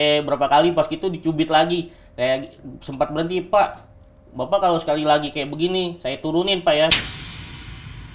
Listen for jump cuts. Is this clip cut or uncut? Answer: uncut